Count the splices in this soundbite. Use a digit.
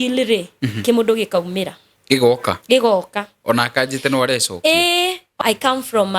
1